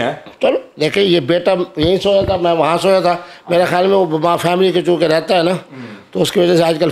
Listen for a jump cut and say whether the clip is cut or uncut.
uncut